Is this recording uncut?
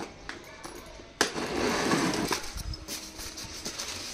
no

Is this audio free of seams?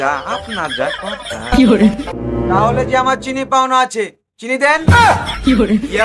no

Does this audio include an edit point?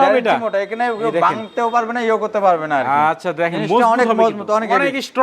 no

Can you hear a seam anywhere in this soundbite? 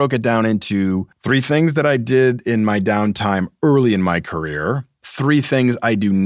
yes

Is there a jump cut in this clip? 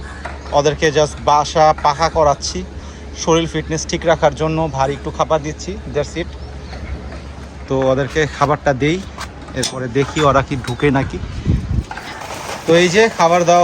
no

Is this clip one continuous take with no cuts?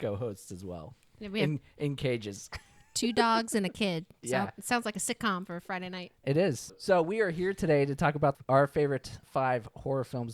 no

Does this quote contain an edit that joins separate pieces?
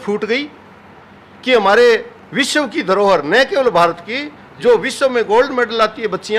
no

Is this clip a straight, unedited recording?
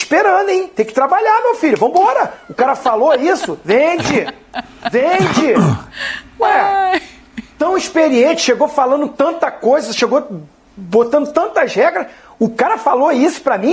yes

